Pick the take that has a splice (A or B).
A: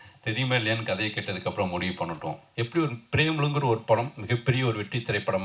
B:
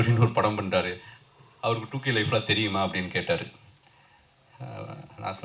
A